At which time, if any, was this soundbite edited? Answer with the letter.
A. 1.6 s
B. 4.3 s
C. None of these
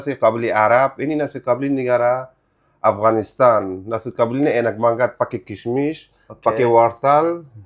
C